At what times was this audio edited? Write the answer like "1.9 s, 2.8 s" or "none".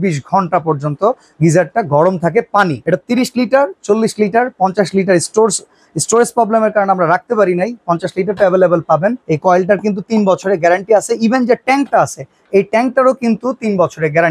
2.8 s, 9.3 s